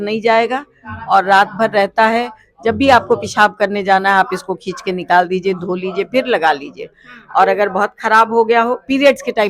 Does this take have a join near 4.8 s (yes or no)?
no